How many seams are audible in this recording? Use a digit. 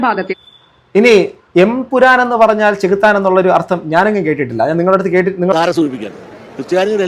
1